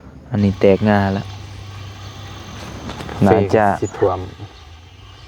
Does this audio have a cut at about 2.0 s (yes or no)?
no